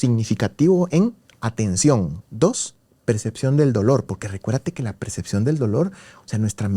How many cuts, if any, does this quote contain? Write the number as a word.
one